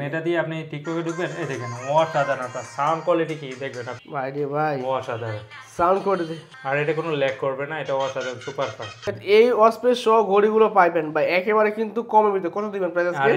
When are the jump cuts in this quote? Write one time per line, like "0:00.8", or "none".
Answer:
0:09.0